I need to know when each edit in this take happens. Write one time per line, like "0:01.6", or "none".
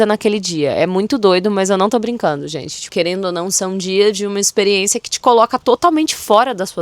0:02.8